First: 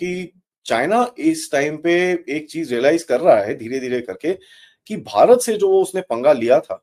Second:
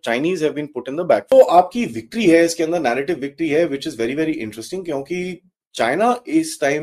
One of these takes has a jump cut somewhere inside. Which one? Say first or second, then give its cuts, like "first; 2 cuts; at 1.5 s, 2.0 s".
second; 1 cut; at 1.3 s